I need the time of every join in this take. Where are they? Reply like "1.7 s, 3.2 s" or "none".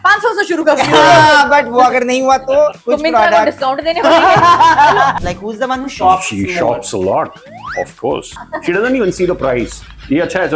2.8 s, 5.1 s, 8.5 s